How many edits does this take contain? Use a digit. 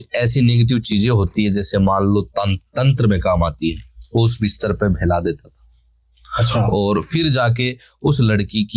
0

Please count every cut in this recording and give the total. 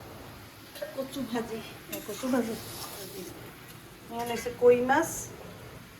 1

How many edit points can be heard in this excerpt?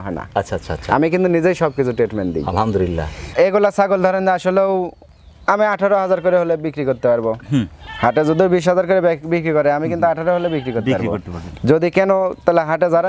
1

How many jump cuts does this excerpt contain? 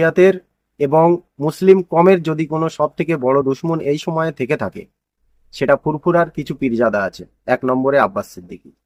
0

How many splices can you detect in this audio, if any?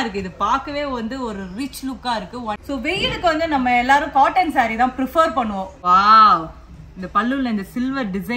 2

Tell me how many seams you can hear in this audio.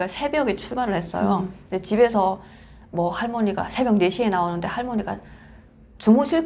0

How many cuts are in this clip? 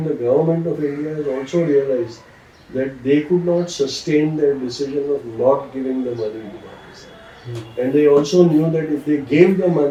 0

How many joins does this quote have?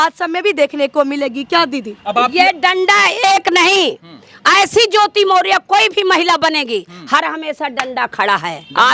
0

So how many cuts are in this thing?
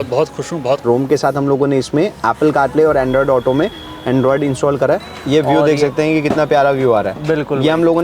2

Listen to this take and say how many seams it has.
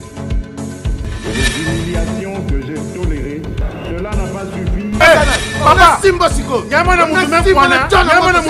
0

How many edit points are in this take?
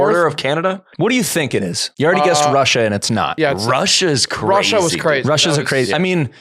3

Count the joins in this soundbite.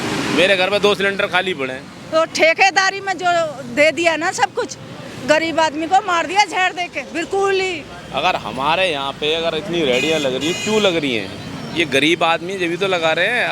2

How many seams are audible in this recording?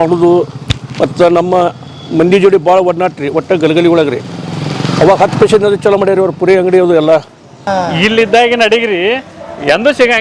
1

